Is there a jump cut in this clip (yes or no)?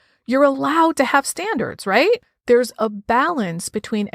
yes